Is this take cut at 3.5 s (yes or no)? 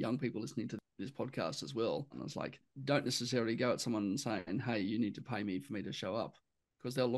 no